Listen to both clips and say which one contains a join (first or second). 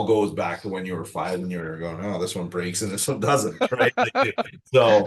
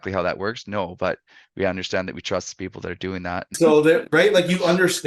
second